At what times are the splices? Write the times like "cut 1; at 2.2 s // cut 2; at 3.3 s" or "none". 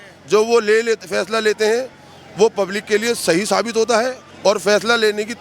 cut 1; at 4.2 s